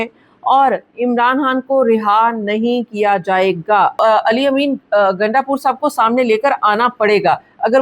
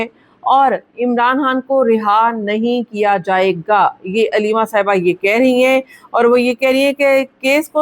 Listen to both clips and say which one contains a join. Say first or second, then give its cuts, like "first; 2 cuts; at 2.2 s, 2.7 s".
first; 1 cut; at 4.0 s